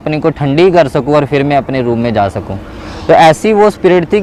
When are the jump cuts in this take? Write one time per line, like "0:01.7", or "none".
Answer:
none